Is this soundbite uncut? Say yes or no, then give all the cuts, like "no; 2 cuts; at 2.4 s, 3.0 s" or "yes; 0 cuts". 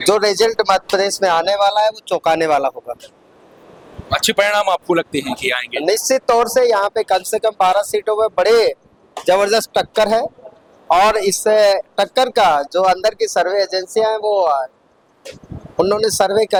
yes; 0 cuts